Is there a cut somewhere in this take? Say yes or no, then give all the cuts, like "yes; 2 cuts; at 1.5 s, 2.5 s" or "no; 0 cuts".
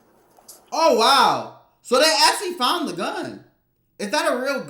no; 0 cuts